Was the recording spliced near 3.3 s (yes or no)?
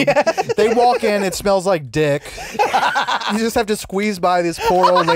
yes